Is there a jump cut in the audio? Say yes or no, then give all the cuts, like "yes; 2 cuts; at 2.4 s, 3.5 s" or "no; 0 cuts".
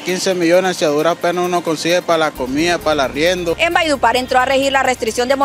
yes; 1 cut; at 3.6 s